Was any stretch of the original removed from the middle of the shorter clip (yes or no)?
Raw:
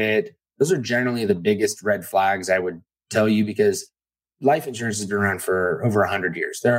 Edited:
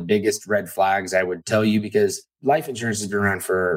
yes